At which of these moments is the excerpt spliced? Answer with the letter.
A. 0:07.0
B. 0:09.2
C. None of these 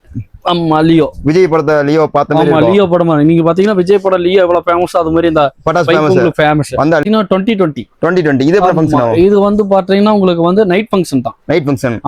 A